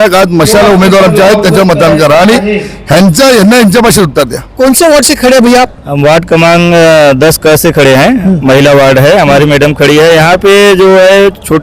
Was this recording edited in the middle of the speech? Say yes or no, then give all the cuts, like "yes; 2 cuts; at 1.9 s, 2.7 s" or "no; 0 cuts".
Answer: yes; 1 cut; at 4.4 s